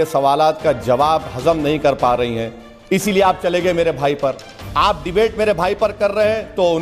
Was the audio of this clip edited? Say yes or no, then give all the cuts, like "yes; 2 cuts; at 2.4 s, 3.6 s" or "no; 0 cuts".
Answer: no; 0 cuts